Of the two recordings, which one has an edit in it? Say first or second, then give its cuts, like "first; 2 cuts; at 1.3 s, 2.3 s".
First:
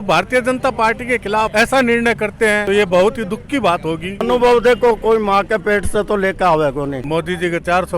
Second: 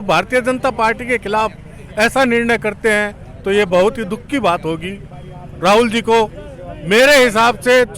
first; 4 cuts; at 1.5 s, 2.6 s, 4.2 s, 7.0 s